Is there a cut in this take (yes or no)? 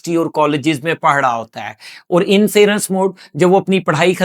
no